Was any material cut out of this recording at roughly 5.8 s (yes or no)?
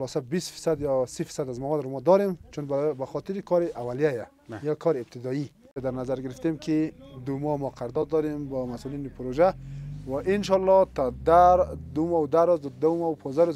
yes